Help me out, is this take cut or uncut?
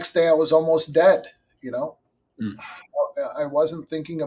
uncut